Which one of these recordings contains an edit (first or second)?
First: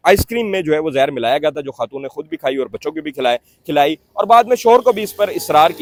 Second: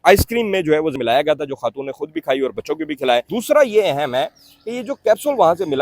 second